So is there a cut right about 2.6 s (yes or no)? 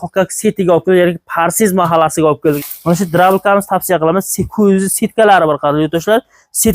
yes